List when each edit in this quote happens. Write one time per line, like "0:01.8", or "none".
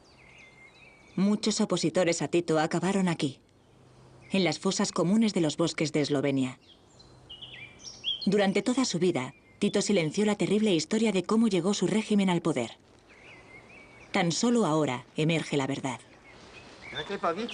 none